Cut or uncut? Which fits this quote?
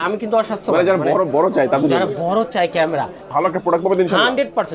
cut